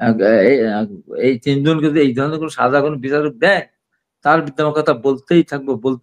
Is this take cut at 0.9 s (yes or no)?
no